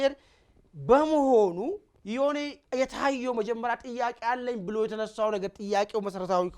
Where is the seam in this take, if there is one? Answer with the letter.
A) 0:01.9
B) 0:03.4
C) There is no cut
A